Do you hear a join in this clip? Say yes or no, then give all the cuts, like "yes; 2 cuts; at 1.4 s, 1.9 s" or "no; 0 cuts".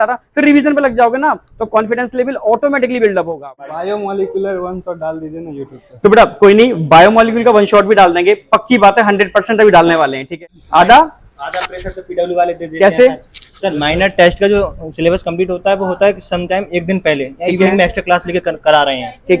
yes; 2 cuts; at 3.8 s, 10.3 s